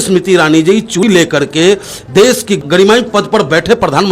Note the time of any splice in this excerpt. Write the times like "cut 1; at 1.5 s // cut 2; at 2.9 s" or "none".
cut 1; at 1.0 s // cut 2; at 2.6 s